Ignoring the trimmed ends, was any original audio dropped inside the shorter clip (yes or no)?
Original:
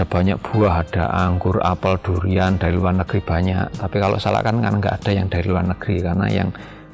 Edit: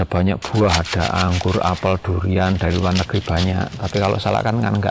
no